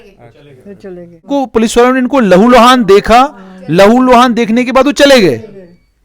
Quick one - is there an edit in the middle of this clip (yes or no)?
yes